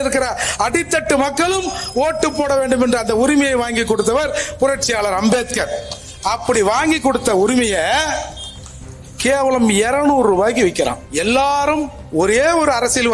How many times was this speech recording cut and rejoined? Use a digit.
1